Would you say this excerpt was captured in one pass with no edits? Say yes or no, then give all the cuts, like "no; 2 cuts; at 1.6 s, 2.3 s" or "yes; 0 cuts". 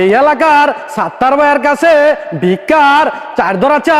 yes; 0 cuts